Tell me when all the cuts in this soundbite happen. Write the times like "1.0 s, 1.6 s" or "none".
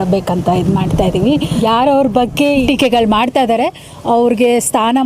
1.5 s, 2.6 s